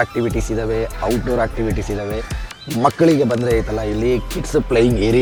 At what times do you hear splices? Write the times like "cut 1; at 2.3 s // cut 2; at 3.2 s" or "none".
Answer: none